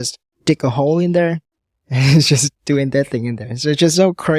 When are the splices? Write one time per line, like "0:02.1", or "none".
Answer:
none